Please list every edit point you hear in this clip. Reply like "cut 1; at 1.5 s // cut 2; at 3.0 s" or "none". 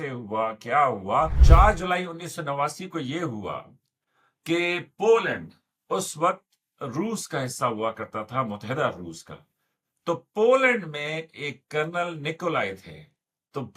cut 1; at 1.4 s